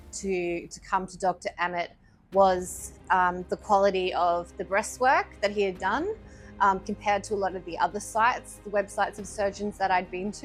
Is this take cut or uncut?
uncut